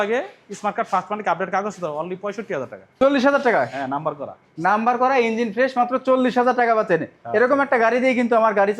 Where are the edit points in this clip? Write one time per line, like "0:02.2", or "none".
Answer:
0:02.9

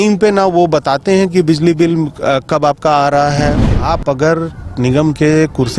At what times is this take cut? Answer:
0:03.6

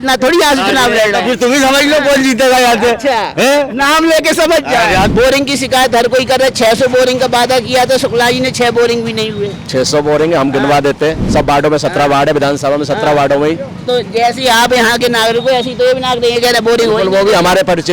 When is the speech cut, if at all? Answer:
0:05.1

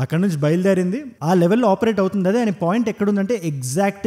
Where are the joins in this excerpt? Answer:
0:01.1

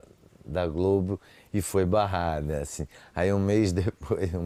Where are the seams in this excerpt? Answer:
none

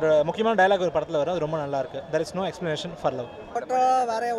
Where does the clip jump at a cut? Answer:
none

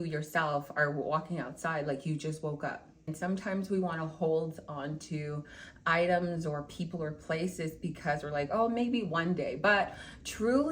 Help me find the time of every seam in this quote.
0:03.1

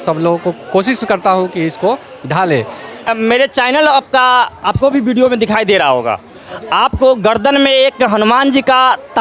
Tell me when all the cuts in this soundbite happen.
0:03.1

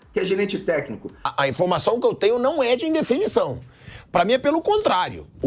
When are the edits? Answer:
0:01.3

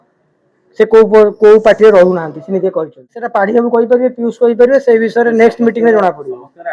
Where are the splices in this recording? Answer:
0:03.3

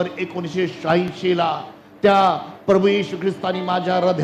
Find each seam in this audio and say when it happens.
none

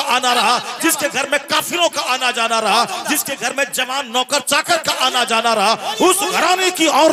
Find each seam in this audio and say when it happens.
none

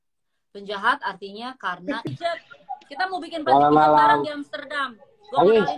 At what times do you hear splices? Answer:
0:02.0

